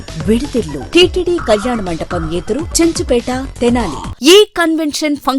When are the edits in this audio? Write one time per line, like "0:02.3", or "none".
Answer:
0:00.8
0:04.0